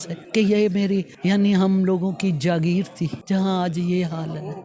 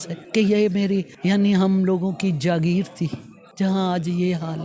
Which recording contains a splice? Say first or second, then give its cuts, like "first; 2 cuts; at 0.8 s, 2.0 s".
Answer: first; 1 cut; at 3.2 s